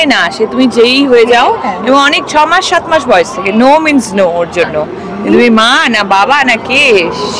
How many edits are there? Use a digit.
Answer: 0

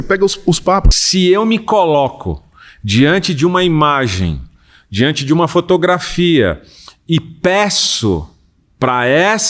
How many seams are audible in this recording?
1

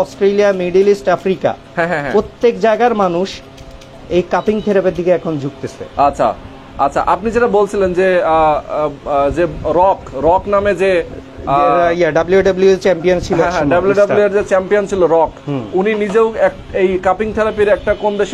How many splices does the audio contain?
0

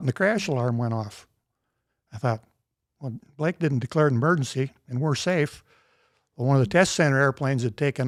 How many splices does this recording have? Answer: 0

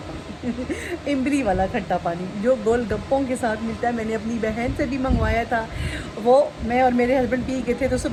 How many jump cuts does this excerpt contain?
0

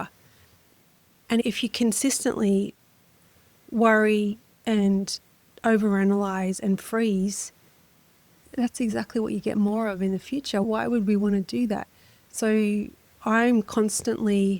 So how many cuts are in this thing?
1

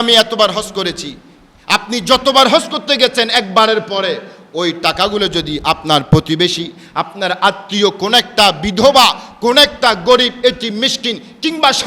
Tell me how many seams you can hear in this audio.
0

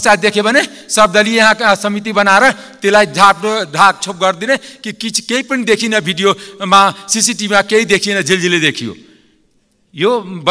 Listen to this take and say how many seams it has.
0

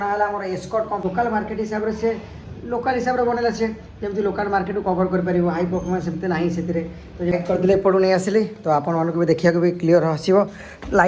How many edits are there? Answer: 2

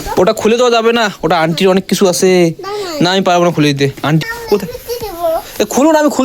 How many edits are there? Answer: 1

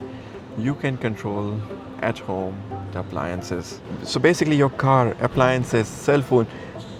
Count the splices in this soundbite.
0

